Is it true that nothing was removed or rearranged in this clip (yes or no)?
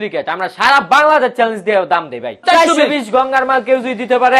no